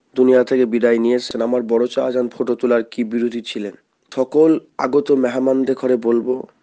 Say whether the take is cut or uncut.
cut